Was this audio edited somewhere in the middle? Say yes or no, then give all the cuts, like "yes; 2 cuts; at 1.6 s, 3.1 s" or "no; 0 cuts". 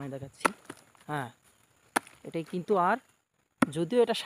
no; 0 cuts